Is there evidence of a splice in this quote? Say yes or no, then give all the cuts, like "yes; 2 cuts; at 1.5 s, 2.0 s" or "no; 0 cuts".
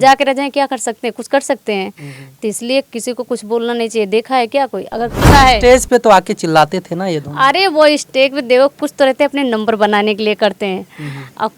yes; 1 cut; at 5.3 s